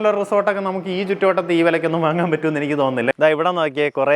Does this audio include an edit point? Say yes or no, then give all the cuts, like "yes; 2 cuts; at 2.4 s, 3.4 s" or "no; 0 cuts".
yes; 1 cut; at 3.1 s